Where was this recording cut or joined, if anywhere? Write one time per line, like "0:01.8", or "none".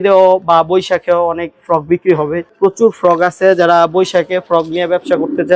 0:02.5